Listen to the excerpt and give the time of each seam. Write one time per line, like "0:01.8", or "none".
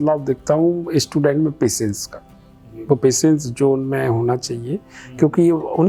none